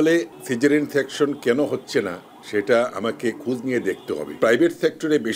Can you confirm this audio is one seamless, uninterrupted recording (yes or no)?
no